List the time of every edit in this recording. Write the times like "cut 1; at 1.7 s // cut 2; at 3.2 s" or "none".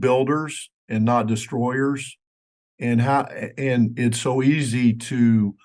none